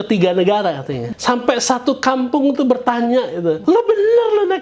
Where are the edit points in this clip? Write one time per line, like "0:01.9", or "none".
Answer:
0:01.0
0:03.6